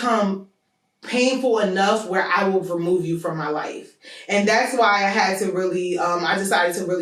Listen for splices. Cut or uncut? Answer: uncut